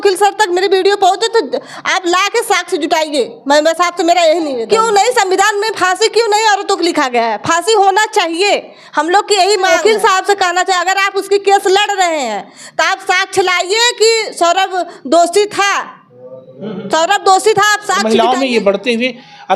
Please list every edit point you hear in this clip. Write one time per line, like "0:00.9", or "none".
0:04.6
0:09.7
0:18.0